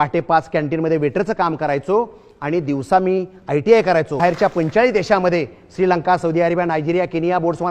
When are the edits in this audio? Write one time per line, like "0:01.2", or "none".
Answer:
0:04.2